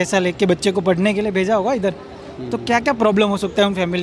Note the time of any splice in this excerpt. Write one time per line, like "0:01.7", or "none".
none